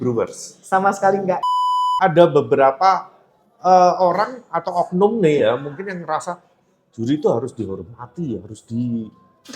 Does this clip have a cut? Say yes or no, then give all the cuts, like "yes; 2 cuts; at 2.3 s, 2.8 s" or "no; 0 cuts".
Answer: yes; 1 cut; at 1.7 s